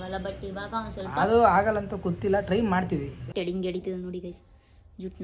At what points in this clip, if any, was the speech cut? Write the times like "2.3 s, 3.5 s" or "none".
3.3 s